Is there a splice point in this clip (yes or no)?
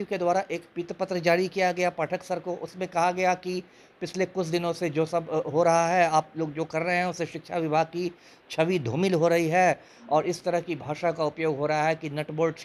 no